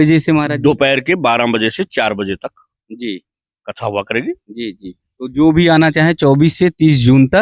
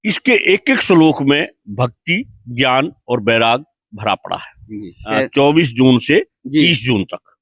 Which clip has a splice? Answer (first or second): second